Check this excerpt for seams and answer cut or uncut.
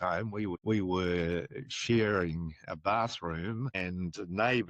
uncut